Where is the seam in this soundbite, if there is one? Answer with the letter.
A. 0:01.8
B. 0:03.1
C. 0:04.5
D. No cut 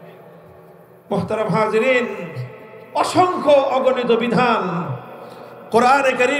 D